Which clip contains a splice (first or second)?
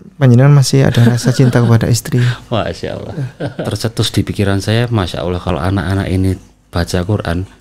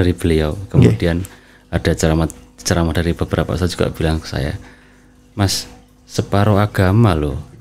first